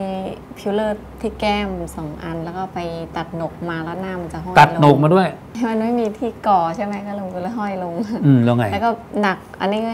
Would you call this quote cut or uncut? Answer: cut